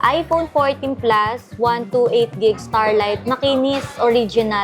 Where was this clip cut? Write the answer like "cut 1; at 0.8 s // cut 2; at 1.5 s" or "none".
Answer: none